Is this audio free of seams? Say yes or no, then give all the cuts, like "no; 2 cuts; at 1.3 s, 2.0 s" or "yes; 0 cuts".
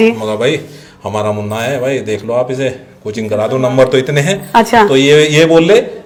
yes; 0 cuts